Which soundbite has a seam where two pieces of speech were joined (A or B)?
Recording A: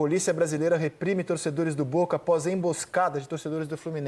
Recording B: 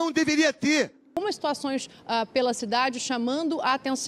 B